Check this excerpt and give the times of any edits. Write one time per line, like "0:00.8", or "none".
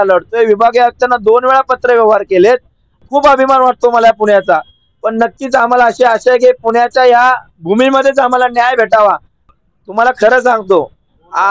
0:03.0
0:09.5